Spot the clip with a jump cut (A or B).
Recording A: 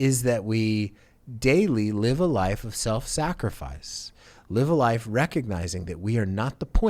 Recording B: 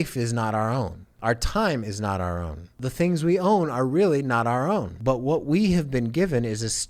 B